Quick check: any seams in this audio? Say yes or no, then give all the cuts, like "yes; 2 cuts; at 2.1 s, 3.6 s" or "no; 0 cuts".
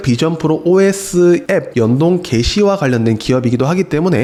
no; 0 cuts